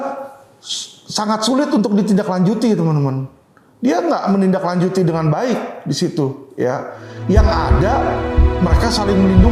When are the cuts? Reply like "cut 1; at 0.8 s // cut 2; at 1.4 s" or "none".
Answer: none